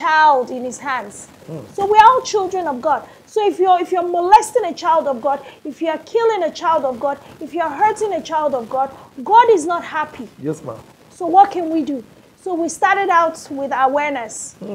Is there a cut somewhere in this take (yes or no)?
no